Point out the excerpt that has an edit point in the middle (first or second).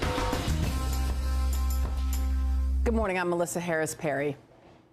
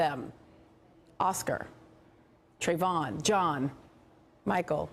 first